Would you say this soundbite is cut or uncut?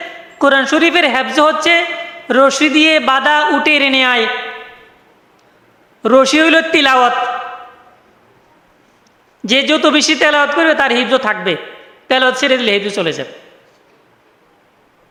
uncut